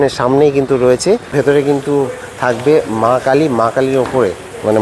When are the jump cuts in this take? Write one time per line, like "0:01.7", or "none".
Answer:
0:01.3

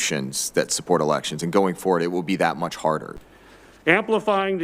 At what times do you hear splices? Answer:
0:03.1

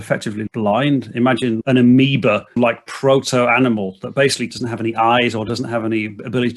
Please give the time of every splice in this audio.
0:01.6
0:02.6
0:04.5

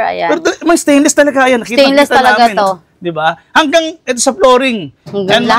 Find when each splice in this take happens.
none

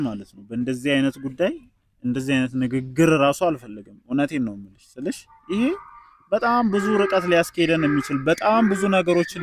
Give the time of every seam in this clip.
none

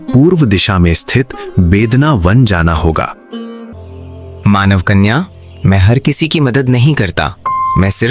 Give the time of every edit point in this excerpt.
0:03.6

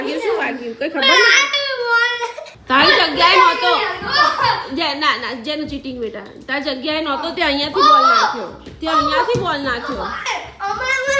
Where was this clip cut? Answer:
0:02.5

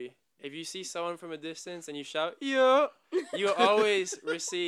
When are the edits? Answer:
none

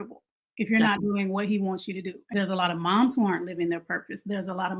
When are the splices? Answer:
0:02.3

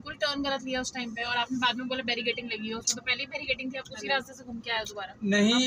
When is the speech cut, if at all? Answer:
none

